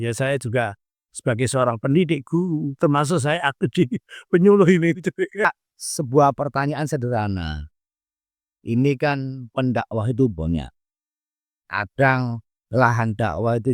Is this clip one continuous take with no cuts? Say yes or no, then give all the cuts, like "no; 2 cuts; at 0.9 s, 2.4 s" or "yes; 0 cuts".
no; 1 cut; at 5.4 s